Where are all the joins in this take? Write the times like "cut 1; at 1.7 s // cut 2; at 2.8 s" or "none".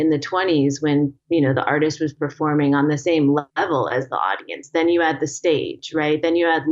none